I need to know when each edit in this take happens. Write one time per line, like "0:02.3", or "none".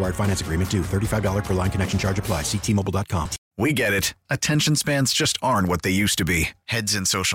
0:03.4